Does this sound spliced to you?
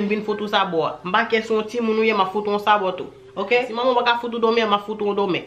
yes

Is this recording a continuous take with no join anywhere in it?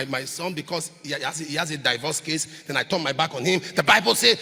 yes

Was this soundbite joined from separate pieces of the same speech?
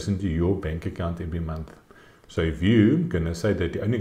no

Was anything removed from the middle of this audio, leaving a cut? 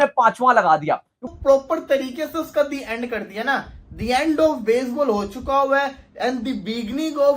yes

